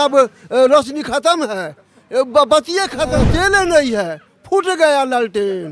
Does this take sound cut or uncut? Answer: cut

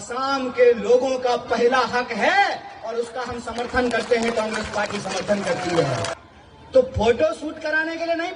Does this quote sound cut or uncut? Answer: uncut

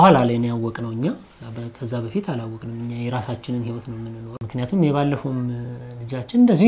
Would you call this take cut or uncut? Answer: cut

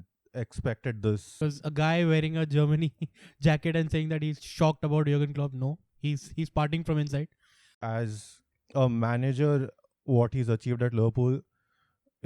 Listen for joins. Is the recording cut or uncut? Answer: cut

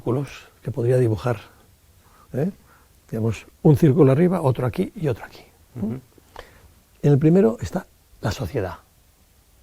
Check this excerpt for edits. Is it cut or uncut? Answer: uncut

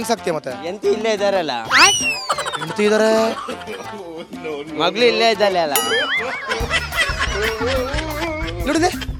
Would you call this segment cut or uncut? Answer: uncut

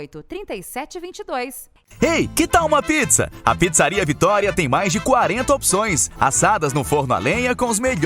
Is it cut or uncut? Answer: cut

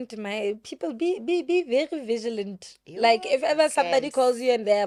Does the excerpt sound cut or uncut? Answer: uncut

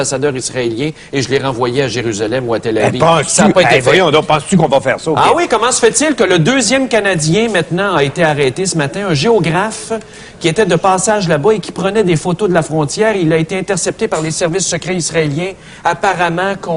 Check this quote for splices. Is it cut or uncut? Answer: cut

